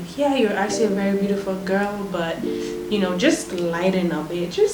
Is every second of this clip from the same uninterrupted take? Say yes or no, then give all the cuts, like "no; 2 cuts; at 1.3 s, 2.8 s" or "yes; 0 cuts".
yes; 0 cuts